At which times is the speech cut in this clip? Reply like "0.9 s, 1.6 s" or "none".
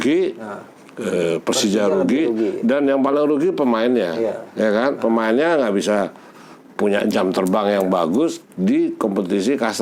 none